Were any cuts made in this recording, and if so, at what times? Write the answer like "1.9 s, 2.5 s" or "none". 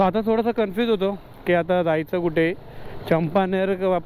none

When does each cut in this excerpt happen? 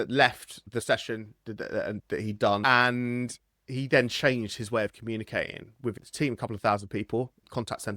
2.6 s, 3.5 s

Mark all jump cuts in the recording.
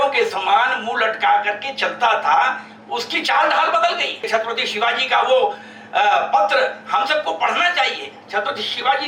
4.2 s

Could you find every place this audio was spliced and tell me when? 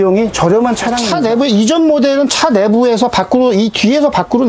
1.0 s

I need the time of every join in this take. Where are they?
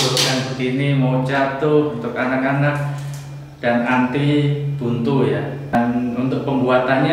5.8 s

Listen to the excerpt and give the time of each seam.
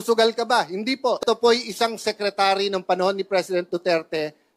1.2 s

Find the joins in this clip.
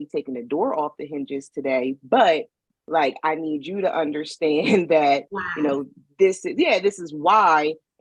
none

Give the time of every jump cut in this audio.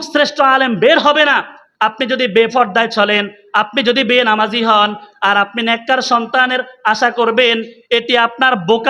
1.6 s

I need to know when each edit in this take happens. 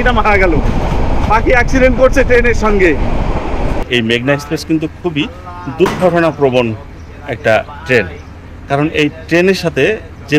3.9 s

